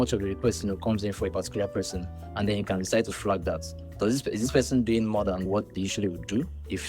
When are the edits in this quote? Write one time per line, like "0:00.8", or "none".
none